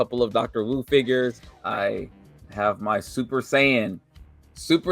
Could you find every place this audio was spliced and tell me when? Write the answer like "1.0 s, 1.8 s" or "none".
1.5 s